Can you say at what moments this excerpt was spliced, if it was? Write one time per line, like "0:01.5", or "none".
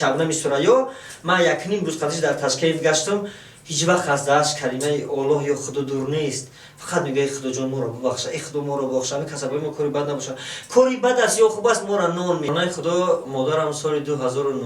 0:12.5

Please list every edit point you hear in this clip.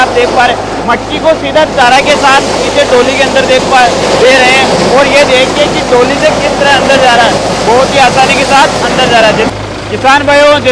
0:09.5

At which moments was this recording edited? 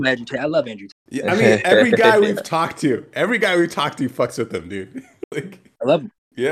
none

